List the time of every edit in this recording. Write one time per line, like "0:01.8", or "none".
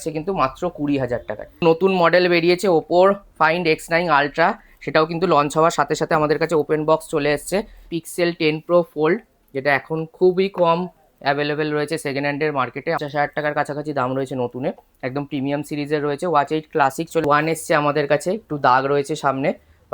0:01.6
0:07.8
0:13.0
0:17.2